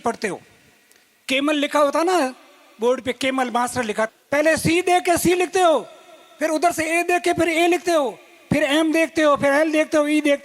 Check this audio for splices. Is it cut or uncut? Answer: cut